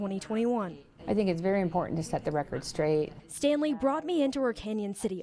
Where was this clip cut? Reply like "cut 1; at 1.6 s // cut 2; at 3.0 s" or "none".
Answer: none